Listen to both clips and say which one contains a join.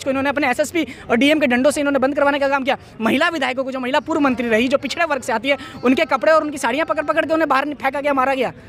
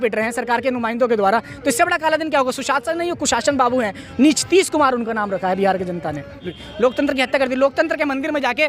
second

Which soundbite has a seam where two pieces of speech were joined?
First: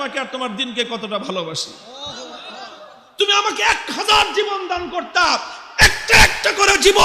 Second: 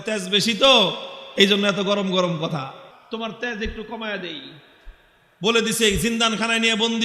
second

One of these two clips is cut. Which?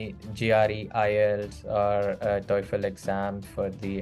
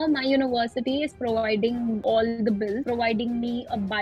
second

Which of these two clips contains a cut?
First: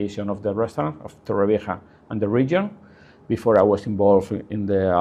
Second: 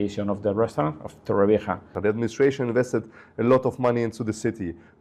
second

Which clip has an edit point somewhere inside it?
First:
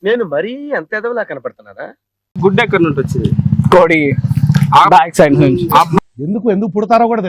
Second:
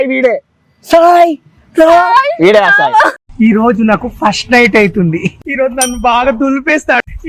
first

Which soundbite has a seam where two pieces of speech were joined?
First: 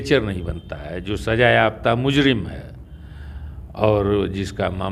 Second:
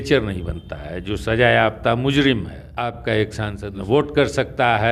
second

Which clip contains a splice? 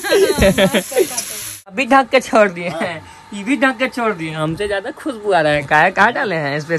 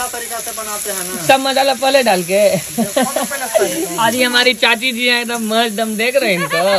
first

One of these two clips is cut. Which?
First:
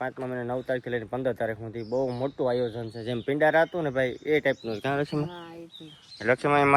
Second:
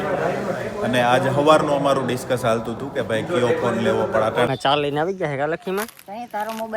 second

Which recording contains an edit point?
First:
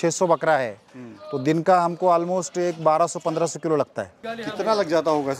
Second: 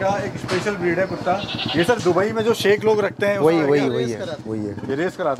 first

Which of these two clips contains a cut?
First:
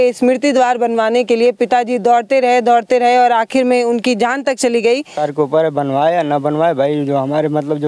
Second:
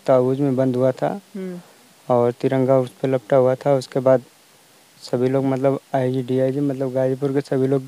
first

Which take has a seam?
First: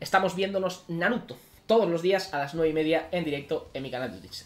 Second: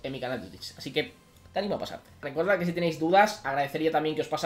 second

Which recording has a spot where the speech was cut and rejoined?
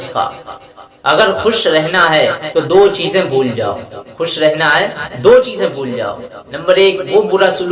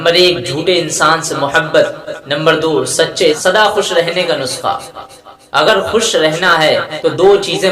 second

